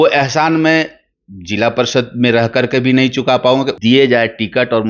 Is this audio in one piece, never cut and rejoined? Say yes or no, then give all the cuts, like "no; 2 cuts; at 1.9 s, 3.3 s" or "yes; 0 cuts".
no; 1 cut; at 3.7 s